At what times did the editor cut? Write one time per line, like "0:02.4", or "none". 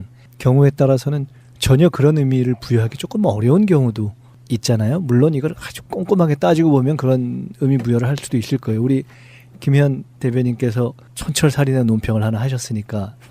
0:04.4